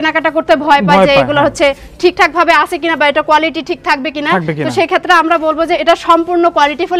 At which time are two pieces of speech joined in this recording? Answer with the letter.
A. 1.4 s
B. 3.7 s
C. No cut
C